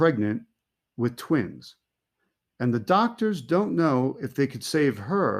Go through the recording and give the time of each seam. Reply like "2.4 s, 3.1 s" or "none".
1.5 s